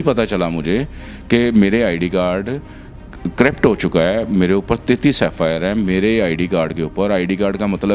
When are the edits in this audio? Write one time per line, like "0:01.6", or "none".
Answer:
none